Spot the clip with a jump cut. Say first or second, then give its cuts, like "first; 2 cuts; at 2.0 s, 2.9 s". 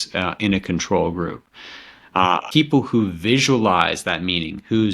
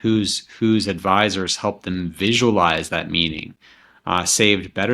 first; 1 cut; at 2.5 s